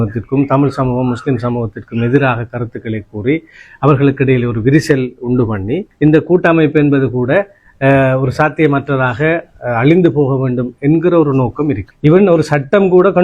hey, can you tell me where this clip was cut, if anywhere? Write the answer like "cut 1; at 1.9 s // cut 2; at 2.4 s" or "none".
cut 1; at 11.9 s